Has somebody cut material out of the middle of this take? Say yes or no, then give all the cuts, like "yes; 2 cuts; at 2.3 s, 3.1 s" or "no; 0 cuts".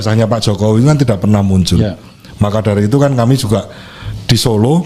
no; 0 cuts